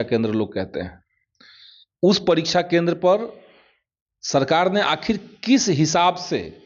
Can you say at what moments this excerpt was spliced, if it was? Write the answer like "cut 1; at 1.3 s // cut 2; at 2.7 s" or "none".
none